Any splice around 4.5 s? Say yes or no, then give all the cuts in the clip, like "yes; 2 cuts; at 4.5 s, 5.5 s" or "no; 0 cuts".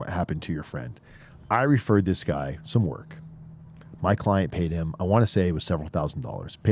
no; 0 cuts